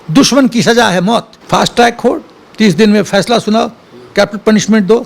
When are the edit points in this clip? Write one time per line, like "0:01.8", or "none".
0:01.4